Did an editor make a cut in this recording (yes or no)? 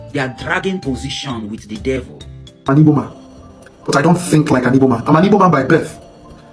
yes